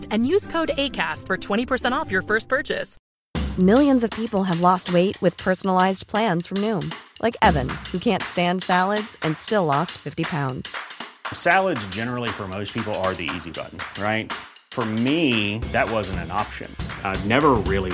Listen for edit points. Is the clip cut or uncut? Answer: cut